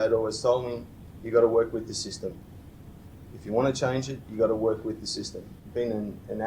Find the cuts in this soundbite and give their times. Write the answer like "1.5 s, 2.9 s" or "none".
5.5 s